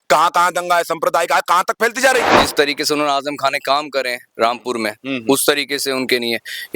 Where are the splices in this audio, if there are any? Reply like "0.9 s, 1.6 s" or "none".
2.4 s